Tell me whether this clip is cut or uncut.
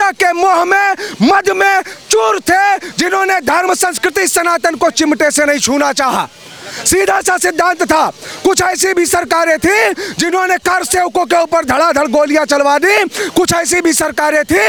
uncut